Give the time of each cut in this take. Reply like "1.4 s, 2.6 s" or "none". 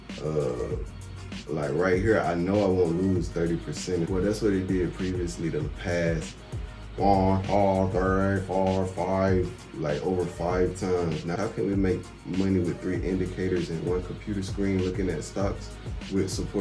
4.1 s, 11.3 s